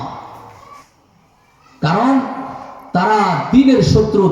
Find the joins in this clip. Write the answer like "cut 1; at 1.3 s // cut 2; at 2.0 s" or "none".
cut 1; at 0.9 s